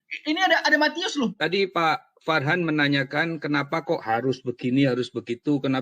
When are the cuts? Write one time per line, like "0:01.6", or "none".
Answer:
0:01.3